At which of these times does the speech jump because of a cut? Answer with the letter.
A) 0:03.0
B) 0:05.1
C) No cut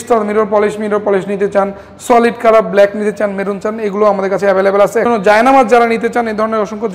B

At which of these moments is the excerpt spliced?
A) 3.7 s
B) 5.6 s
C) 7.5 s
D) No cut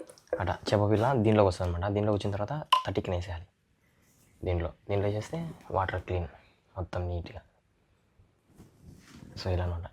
D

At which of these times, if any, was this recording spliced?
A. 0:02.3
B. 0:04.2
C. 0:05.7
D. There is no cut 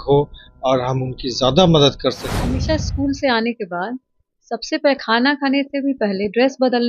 A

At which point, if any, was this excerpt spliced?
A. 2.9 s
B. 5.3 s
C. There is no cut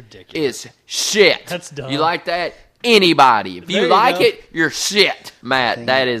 B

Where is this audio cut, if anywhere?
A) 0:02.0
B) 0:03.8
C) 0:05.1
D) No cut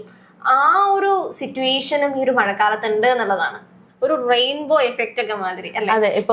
B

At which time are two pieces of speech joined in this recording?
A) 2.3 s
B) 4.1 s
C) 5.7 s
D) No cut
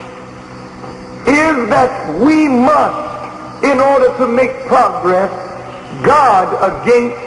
A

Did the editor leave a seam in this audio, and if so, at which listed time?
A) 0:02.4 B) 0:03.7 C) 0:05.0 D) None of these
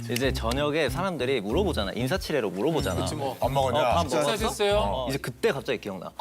C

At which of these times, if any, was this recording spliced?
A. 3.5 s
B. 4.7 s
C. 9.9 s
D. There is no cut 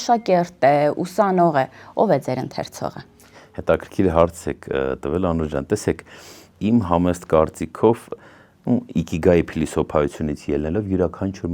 D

